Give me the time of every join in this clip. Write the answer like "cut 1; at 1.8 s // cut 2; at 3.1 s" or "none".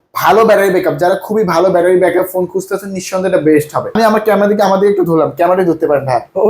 cut 1; at 3.9 s